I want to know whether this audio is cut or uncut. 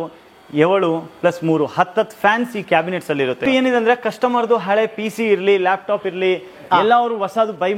cut